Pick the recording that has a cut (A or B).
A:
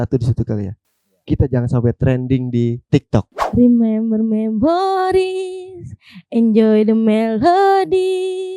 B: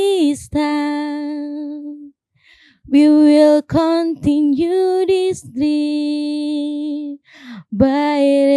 A